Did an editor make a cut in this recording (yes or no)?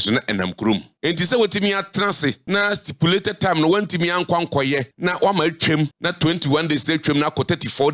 yes